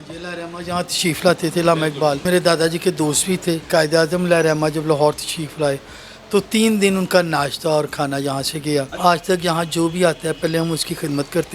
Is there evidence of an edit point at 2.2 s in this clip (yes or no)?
yes